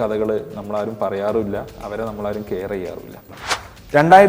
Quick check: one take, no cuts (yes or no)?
no